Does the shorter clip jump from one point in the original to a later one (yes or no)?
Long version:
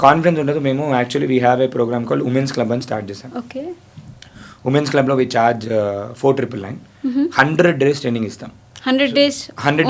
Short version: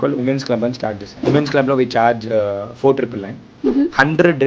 yes